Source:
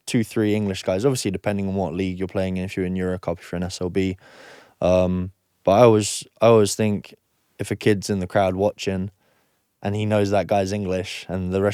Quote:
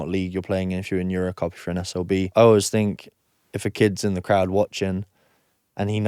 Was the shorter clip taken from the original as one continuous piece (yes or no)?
no